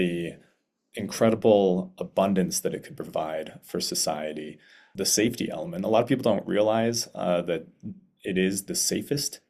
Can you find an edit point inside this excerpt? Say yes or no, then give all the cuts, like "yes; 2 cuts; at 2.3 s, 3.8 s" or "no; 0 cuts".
yes; 1 cut; at 4.8 s